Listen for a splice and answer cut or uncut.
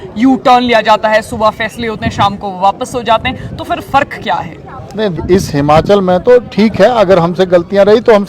cut